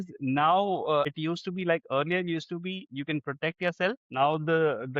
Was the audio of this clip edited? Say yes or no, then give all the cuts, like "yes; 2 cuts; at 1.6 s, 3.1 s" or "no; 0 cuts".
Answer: no; 0 cuts